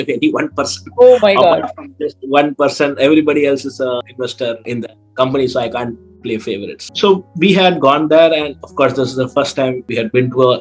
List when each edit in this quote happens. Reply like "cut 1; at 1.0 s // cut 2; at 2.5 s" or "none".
cut 1; at 6.8 s